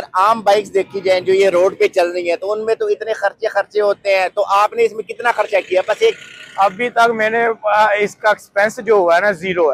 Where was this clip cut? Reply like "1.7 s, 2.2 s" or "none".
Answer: none